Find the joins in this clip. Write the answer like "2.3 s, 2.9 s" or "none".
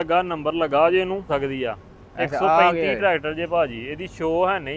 1.3 s